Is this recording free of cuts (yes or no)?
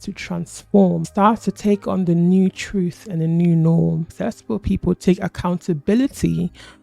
no